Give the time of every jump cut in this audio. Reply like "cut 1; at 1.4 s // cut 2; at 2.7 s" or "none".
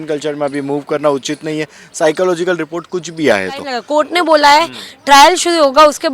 cut 1; at 3.8 s